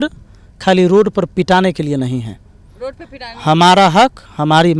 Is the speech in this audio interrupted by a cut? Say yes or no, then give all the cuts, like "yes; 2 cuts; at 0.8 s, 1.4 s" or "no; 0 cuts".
no; 0 cuts